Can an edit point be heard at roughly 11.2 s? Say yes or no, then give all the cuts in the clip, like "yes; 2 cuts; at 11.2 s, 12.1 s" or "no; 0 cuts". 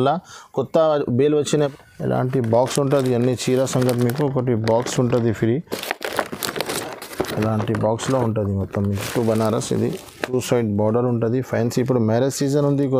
no; 2 cuts; at 1.7 s, 9.0 s